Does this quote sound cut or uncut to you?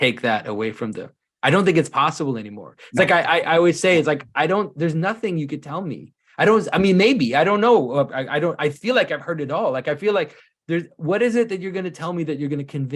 uncut